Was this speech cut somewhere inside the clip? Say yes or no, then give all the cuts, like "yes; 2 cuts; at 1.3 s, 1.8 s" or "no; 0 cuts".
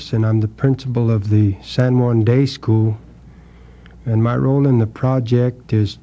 yes; 1 cut; at 4.2 s